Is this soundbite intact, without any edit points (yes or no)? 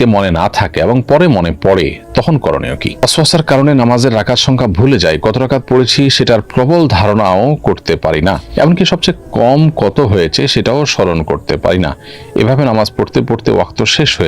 no